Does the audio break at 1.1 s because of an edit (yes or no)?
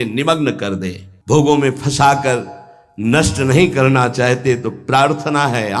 yes